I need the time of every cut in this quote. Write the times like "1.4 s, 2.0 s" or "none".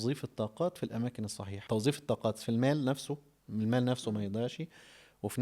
1.5 s

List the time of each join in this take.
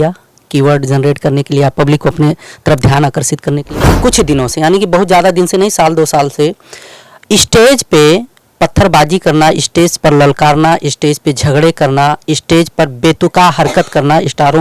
3.8 s

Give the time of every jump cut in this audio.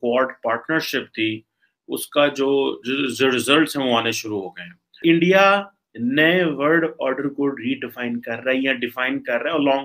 5.0 s

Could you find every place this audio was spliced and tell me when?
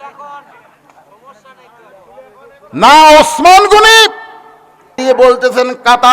5.0 s

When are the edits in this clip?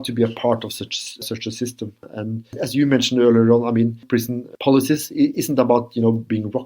2.1 s, 4.0 s

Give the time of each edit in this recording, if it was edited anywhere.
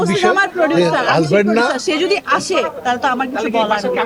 none

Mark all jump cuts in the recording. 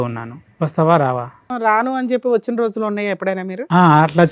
1.5 s

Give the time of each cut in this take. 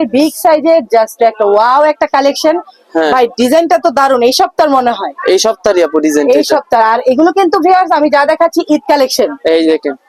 none

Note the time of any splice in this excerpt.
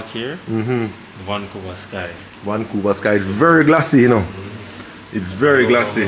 none

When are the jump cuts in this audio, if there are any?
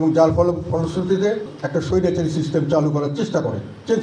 1.6 s

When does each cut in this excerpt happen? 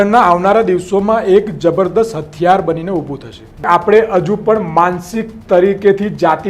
3.6 s

